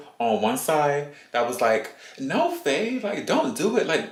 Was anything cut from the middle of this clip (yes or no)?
no